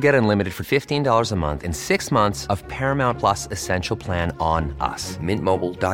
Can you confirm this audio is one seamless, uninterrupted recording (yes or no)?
yes